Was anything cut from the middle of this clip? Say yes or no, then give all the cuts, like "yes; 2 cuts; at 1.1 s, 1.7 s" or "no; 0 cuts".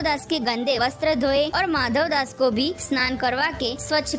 no; 0 cuts